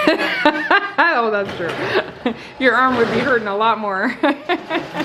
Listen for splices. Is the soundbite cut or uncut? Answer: uncut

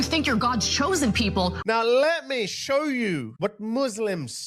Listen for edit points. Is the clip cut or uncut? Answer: cut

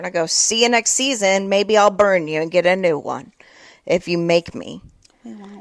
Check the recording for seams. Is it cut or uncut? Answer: uncut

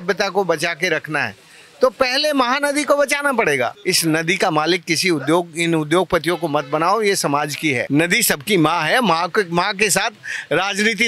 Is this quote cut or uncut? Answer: cut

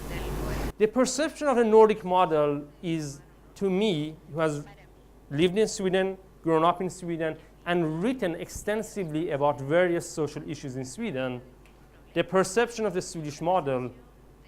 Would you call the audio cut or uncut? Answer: cut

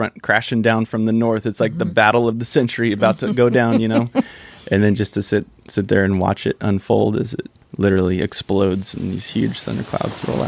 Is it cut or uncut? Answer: uncut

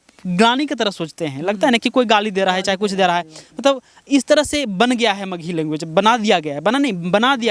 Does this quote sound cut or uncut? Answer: uncut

